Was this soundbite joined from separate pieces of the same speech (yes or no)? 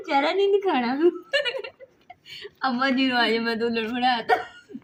no